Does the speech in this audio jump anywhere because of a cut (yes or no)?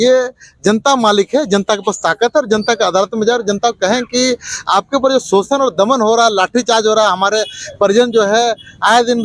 no